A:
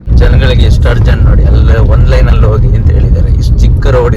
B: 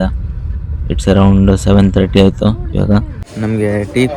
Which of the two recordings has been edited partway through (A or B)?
B